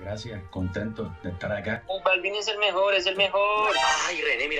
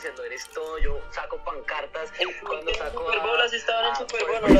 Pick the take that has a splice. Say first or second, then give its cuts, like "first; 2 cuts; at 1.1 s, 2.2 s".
first; 1 cut; at 1.8 s